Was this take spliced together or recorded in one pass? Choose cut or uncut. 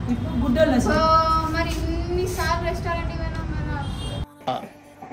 uncut